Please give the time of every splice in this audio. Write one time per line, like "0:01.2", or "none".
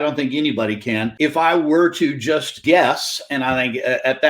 0:01.1
0:02.5